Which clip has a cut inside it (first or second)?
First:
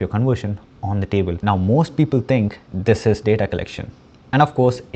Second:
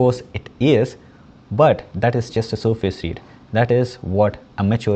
first